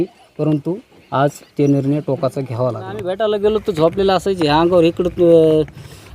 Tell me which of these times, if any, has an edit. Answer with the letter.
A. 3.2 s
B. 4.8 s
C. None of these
A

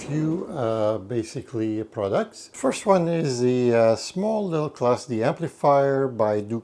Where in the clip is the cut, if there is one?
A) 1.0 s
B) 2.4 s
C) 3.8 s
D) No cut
B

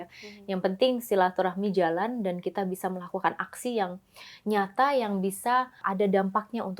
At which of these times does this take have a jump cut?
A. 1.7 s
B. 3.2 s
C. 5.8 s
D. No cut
C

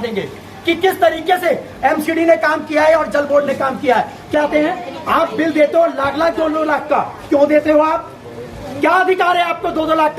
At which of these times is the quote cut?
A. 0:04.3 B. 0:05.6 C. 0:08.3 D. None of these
A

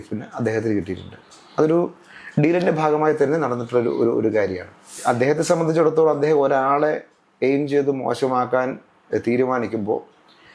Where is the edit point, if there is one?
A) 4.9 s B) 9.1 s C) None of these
A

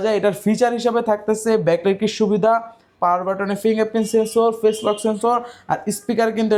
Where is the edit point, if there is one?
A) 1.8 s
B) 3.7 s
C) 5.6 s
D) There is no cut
D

